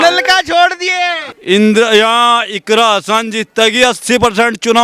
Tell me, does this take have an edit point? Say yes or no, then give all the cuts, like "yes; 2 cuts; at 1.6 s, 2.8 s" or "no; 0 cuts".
yes; 1 cut; at 1.2 s